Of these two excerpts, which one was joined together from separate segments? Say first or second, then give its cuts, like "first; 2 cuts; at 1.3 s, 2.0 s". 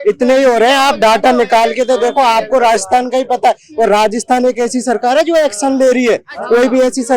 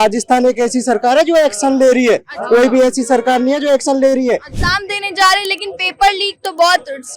second; 1 cut; at 4.5 s